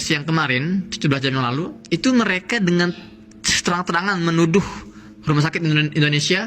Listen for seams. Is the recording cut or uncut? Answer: cut